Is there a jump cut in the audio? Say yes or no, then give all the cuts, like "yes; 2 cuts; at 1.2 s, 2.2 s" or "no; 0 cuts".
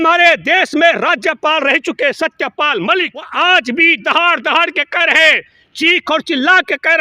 yes; 1 cut; at 3.3 s